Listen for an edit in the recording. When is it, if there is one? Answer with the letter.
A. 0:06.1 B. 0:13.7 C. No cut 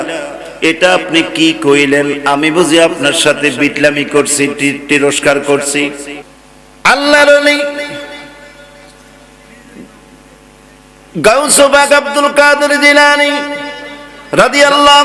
A